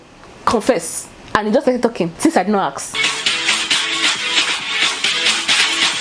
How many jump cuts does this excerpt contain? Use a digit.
0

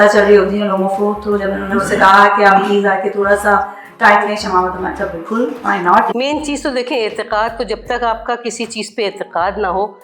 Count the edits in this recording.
1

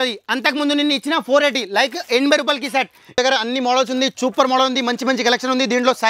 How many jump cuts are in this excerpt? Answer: 1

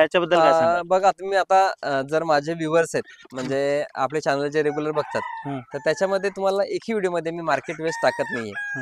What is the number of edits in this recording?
0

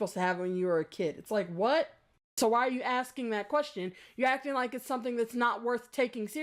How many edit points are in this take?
1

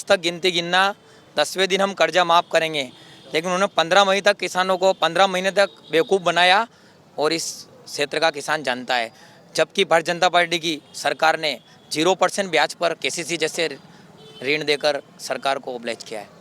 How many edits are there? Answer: 0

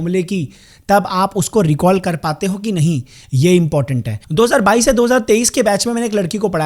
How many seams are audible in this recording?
1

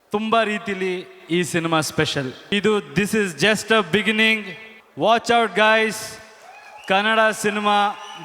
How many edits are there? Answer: 1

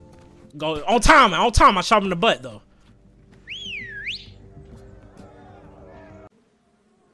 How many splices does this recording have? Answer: 0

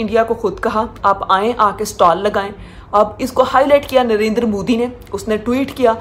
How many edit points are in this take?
0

